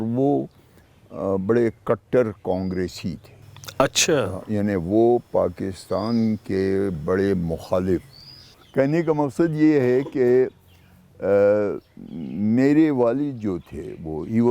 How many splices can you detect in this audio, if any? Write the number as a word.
one